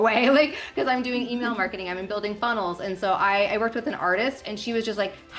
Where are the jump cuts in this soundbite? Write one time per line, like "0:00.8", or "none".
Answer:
none